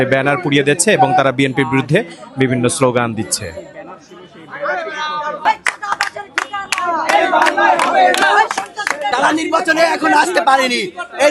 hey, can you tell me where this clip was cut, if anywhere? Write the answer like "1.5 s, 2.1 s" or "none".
5.5 s, 9.1 s